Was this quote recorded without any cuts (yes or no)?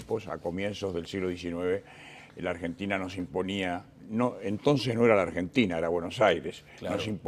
yes